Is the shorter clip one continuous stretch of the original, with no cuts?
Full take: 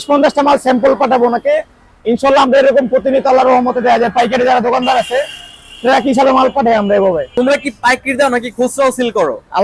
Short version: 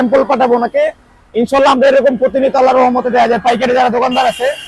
yes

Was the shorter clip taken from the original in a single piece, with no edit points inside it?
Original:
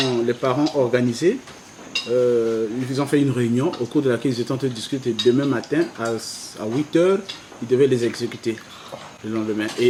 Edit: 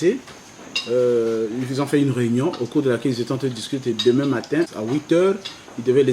no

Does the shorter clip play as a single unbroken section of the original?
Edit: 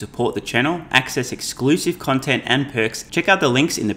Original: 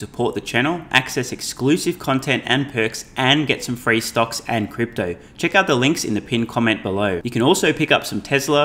no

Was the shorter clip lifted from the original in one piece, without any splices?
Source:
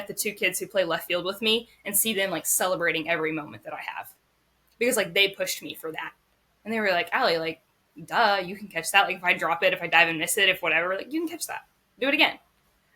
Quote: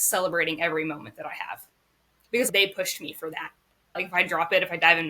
no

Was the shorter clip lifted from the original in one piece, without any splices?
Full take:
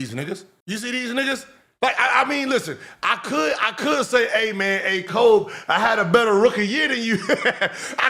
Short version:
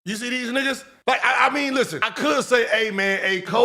no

